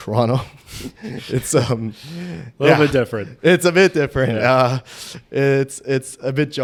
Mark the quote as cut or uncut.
uncut